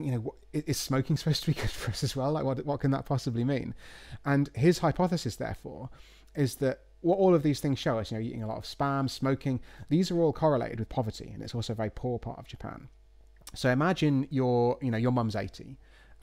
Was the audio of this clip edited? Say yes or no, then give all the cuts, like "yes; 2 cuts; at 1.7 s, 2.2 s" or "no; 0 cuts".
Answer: no; 0 cuts